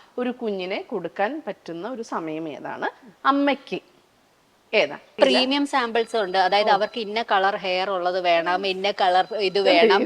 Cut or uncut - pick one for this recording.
cut